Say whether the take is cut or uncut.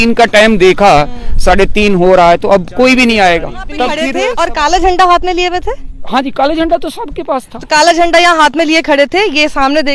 cut